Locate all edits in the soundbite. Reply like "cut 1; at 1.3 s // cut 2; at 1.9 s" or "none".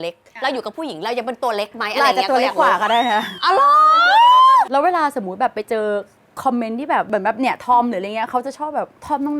cut 1; at 4.7 s // cut 2; at 7.1 s